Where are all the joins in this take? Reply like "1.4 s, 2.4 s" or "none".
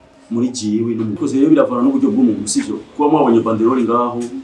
1.2 s